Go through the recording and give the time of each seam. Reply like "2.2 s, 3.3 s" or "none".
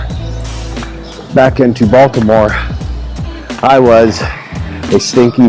none